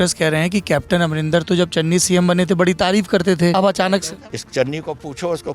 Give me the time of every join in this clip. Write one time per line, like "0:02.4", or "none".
0:03.7